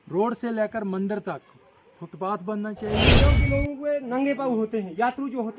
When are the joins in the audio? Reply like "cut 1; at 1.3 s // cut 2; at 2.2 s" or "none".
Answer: cut 1; at 3.1 s

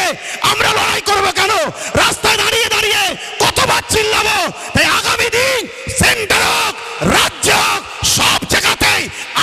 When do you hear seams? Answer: none

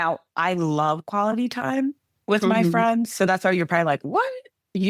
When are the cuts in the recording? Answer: cut 1; at 2.1 s

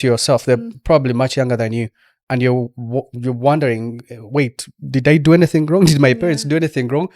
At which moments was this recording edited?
none

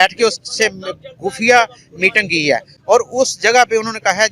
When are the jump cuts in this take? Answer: cut 1; at 2.7 s

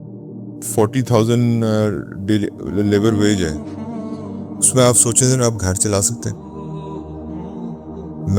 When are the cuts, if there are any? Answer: cut 1; at 3.5 s // cut 2; at 4.7 s // cut 3; at 6.2 s // cut 4; at 7.5 s

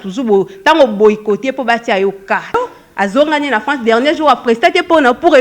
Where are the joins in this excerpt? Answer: cut 1; at 2.5 s

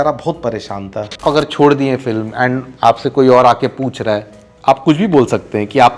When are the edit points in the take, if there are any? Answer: cut 1; at 1.2 s

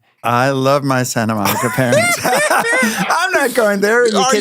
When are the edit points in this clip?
none

